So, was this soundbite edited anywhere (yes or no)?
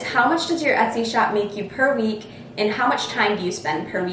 no